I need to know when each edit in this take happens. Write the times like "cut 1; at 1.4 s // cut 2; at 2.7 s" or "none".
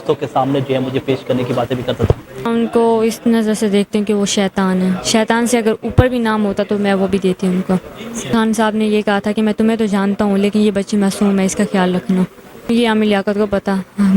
cut 1; at 2.5 s // cut 2; at 8.3 s // cut 3; at 12.7 s